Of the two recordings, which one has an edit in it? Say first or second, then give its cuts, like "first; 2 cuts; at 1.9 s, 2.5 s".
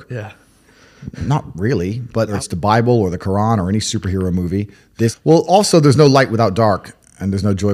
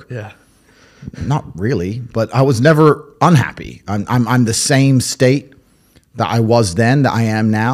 first; 2 cuts; at 2.3 s, 5.2 s